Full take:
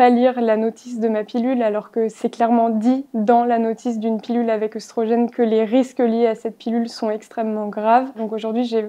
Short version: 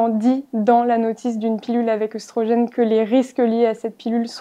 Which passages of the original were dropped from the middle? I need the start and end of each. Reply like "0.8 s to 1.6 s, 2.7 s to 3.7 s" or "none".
none